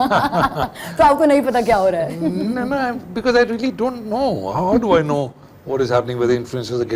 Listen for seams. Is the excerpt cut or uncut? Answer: uncut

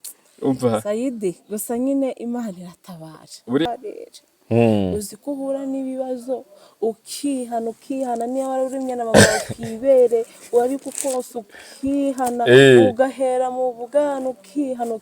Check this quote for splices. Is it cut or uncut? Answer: cut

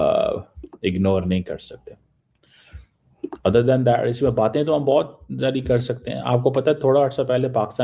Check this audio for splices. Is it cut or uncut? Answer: uncut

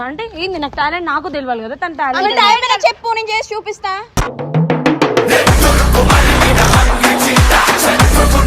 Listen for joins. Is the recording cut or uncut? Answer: uncut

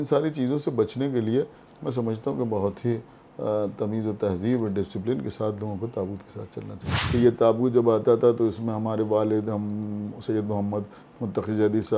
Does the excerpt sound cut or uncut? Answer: cut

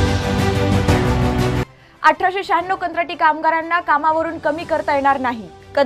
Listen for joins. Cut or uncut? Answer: cut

